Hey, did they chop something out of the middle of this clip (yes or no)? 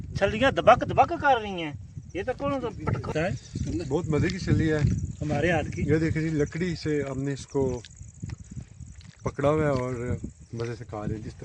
yes